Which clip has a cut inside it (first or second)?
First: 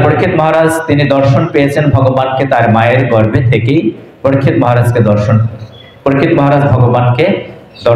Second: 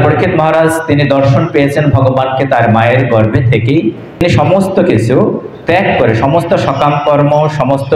second